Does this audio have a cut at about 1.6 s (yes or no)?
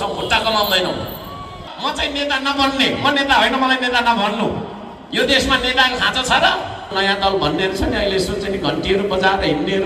yes